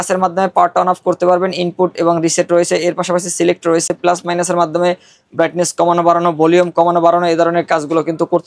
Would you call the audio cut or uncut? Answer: uncut